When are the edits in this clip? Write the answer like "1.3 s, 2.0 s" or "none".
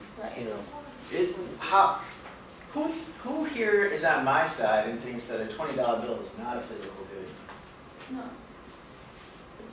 1.5 s